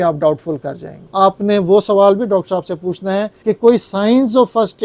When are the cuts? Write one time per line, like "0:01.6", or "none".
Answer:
0:01.0
0:03.3